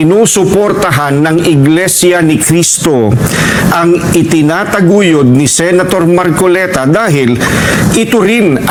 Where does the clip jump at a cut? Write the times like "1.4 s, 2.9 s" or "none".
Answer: none